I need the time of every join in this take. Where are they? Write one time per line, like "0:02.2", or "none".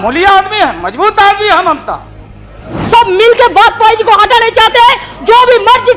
0:02.7